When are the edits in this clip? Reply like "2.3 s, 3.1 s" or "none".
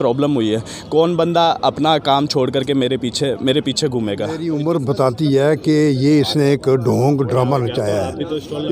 4.4 s